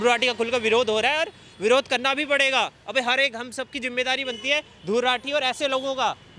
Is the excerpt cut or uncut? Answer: uncut